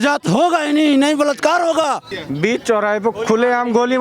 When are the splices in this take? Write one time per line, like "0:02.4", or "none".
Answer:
0:02.2